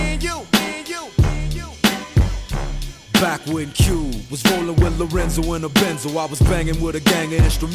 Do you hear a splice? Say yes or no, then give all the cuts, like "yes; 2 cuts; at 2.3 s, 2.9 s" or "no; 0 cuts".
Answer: no; 0 cuts